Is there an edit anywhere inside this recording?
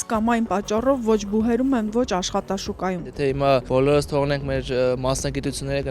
yes; 1 cut; at 3.3 s

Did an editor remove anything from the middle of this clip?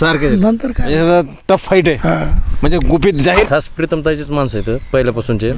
yes; 1 cut; at 3.5 s

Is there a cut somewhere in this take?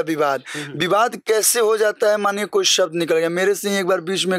no; 0 cuts

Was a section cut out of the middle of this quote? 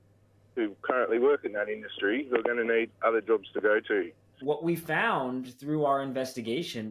yes; 1 cut; at 4.4 s

